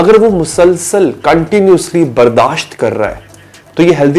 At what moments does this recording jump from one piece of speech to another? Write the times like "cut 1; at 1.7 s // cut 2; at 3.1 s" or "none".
none